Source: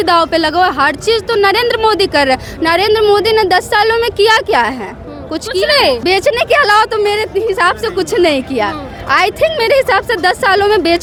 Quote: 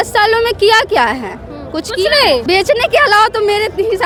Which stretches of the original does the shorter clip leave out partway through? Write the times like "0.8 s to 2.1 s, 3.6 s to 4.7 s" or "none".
none